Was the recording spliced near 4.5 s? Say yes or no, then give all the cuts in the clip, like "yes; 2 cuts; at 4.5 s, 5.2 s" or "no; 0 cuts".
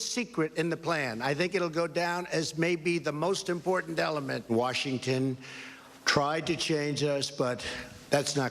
yes; 1 cut; at 4.5 s